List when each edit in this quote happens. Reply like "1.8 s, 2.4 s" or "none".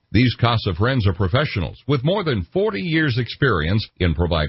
none